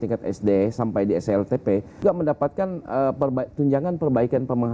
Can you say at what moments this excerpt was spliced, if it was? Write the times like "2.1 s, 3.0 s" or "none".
2.0 s